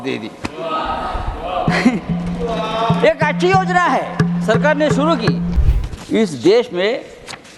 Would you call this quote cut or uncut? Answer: cut